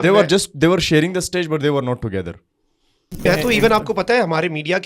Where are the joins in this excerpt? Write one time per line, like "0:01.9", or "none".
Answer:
0:03.2